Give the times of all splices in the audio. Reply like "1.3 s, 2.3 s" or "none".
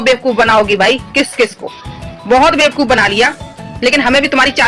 none